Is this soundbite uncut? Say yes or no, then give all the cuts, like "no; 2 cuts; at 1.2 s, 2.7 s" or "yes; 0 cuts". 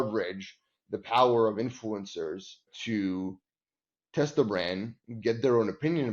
no; 1 cut; at 2.7 s